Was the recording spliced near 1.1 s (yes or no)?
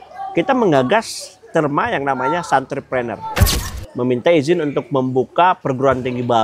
no